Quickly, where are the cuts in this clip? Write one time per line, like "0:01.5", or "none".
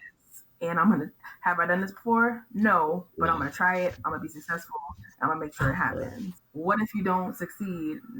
0:06.4